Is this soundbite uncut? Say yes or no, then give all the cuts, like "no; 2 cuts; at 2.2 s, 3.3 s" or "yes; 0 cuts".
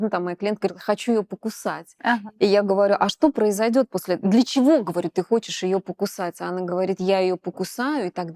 yes; 0 cuts